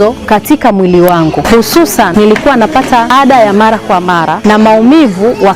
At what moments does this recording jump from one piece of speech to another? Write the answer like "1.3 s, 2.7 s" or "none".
2.1 s, 3.1 s, 4.3 s